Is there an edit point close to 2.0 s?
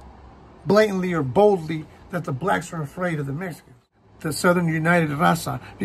no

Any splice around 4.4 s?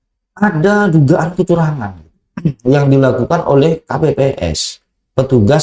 no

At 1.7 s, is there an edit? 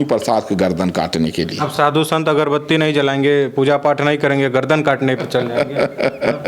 no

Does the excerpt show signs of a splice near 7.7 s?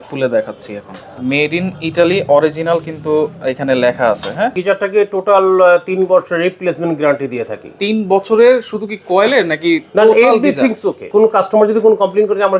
no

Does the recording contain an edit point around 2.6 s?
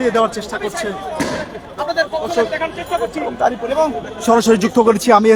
no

